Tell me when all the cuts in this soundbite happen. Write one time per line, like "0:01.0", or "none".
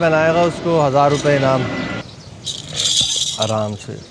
0:02.0